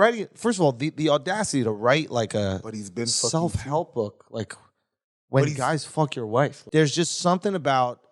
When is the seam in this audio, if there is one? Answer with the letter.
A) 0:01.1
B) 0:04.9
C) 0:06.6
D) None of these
C